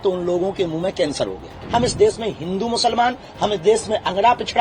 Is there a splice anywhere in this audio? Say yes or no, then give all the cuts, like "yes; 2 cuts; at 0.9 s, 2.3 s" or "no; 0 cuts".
yes; 1 cut; at 1.6 s